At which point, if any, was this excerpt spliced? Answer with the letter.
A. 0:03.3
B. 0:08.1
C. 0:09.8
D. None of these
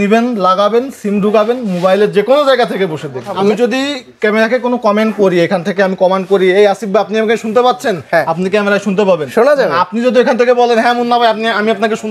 A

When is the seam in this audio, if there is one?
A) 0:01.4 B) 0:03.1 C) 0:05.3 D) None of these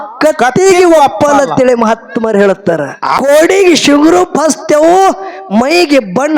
B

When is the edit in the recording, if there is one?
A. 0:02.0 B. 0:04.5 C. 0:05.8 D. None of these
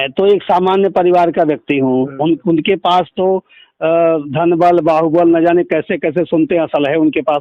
D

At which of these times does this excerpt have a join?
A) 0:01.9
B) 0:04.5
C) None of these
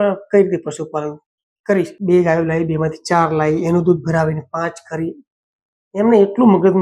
A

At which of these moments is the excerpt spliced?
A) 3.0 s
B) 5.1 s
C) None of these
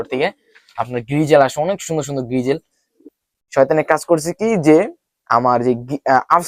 A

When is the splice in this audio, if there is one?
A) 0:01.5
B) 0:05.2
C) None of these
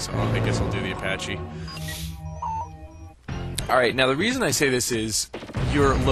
B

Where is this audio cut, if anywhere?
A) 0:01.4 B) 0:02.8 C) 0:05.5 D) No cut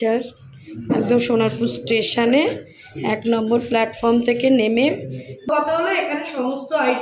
C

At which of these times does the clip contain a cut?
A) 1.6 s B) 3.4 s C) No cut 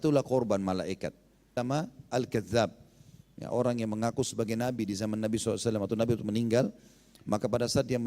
A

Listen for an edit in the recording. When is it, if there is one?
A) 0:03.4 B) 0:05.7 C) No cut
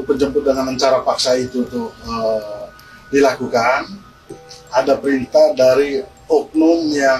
C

